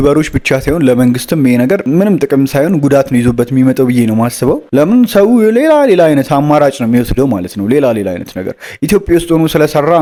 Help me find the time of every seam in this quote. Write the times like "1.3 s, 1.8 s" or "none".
none